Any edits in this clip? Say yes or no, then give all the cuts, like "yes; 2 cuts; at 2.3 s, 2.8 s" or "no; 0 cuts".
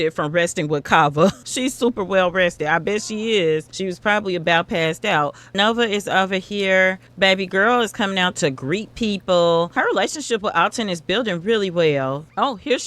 no; 0 cuts